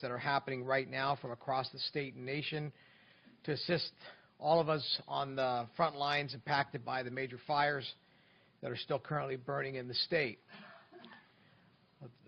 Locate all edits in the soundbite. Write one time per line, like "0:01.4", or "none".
0:08.5